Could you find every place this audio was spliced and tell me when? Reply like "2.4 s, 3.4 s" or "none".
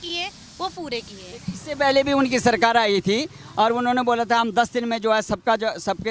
none